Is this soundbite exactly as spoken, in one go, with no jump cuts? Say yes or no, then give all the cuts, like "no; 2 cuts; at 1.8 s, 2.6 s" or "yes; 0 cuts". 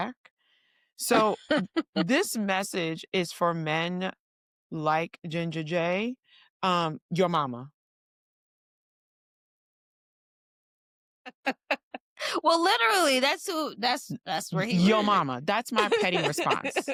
yes; 0 cuts